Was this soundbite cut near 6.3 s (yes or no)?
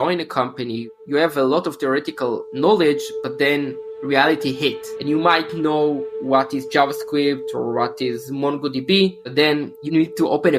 no